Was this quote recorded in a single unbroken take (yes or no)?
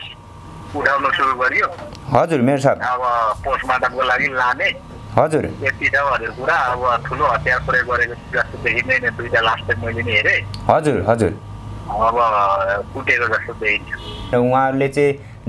no